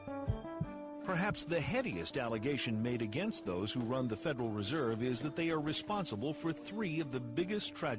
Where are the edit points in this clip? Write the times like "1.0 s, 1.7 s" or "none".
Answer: 2.1 s

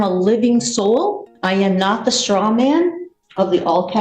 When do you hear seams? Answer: 1.3 s

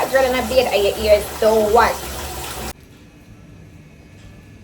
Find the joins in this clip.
2.7 s

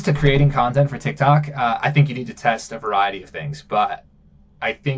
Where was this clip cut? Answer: none

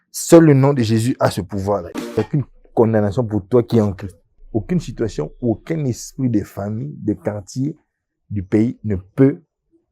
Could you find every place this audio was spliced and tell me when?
1.9 s

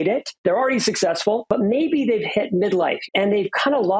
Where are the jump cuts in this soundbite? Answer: 1.5 s, 3.0 s

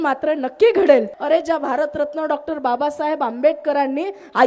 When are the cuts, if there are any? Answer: 1.1 s

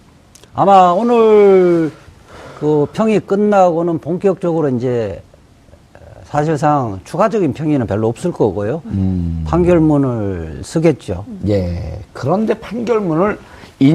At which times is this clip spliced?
1.6 s

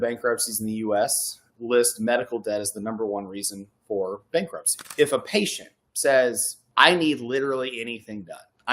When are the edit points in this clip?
4.8 s

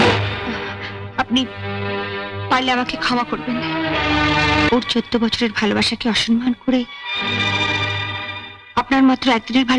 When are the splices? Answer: 4.7 s

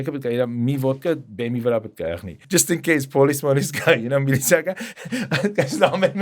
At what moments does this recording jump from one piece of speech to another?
2.3 s

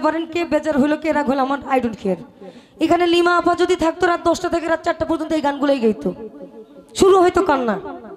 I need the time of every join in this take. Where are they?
none

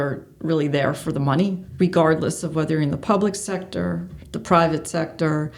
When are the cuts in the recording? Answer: 1.6 s

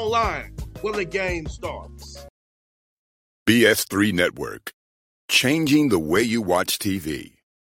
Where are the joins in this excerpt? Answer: 2.2 s

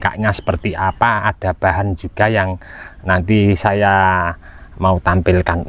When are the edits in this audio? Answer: none

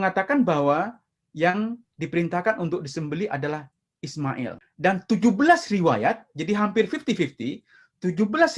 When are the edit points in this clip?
4.6 s

